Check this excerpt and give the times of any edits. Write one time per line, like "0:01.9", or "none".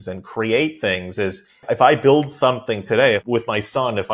0:01.6
0:03.2